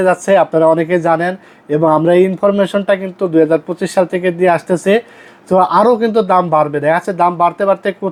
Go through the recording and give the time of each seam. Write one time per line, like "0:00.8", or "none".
none